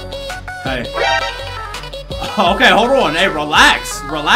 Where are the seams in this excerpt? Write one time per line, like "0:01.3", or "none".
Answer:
none